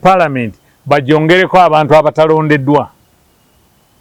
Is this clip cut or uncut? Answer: uncut